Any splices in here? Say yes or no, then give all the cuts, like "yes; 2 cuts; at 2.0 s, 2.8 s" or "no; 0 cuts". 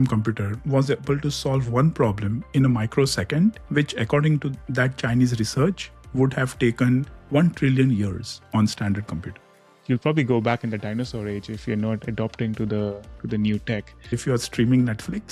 yes; 2 cuts; at 9.7 s, 14.2 s